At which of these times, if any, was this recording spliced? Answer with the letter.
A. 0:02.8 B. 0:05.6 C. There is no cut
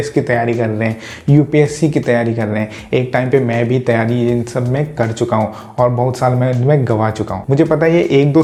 C